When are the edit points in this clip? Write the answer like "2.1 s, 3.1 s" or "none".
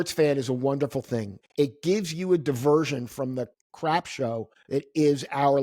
1.4 s, 3.6 s, 4.5 s

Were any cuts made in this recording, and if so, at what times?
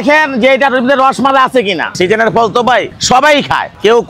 1.9 s

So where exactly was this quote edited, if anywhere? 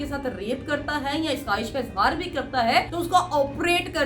2.9 s

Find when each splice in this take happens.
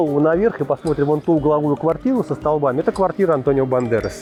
none

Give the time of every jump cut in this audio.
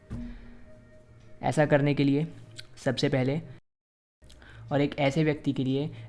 3.8 s

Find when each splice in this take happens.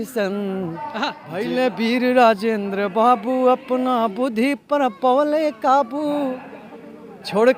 1.3 s

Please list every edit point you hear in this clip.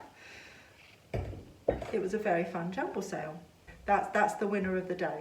3.6 s

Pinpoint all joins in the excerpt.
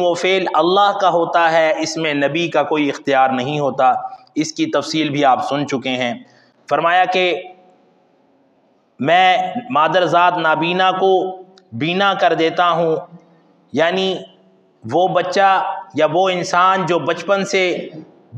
none

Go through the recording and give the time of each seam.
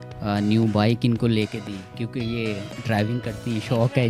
none

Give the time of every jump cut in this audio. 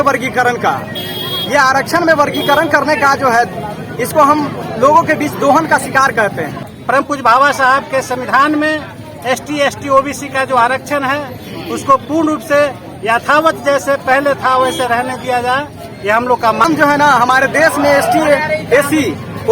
7.1 s, 16.6 s

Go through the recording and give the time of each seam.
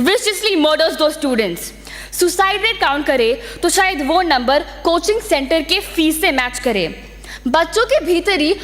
none

